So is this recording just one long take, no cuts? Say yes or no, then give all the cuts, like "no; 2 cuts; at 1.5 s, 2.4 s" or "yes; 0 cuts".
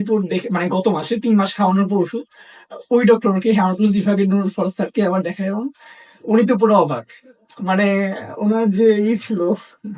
yes; 0 cuts